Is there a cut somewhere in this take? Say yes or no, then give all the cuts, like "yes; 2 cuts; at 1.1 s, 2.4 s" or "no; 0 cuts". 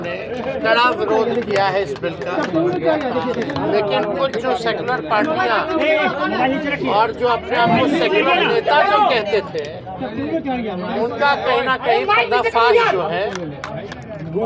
no; 0 cuts